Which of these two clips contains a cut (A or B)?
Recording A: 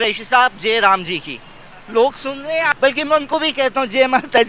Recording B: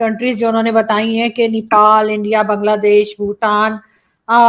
A